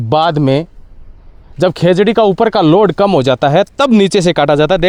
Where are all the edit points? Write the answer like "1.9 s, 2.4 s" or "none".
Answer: none